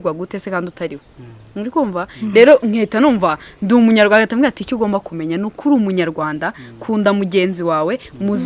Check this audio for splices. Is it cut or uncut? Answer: uncut